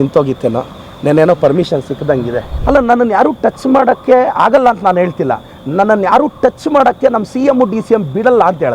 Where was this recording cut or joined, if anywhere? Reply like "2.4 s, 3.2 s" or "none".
2.5 s